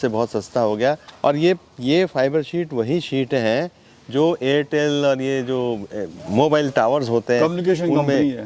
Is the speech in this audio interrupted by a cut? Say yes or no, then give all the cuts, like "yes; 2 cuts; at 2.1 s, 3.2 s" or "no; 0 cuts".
no; 0 cuts